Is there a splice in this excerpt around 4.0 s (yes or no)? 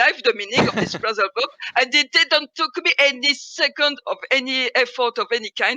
yes